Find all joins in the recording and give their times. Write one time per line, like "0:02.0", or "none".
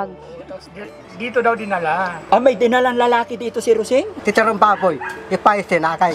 0:04.1